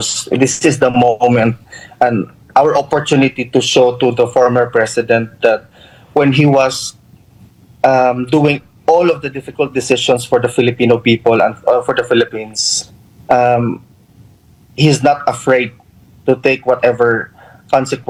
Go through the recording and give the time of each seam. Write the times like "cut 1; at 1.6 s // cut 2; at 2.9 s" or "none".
none